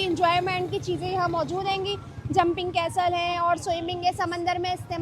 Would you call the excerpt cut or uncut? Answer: uncut